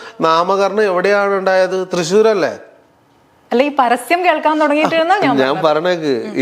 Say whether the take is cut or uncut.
uncut